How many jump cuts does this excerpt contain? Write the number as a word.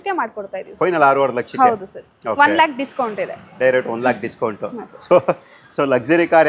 zero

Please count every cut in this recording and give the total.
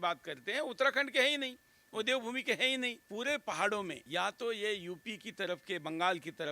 two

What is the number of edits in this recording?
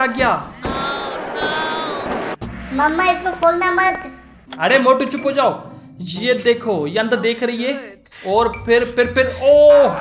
one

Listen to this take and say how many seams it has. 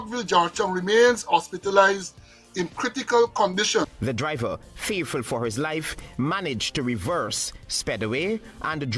one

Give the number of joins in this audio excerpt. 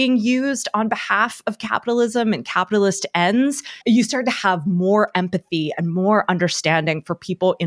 one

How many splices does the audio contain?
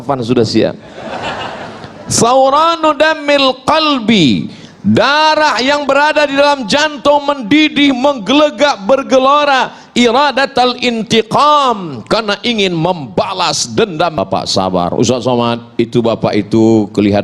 one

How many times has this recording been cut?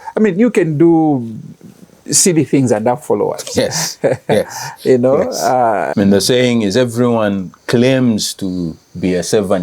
one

